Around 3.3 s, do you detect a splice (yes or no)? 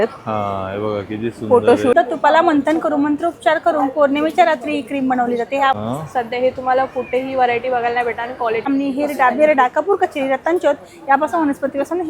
no